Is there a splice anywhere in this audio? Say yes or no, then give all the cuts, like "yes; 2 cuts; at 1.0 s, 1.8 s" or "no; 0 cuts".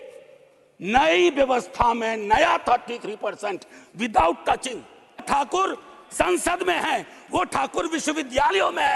yes; 1 cut; at 5.2 s